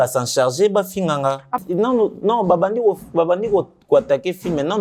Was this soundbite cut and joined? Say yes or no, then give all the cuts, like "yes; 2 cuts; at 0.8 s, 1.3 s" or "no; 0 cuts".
yes; 1 cut; at 1.6 s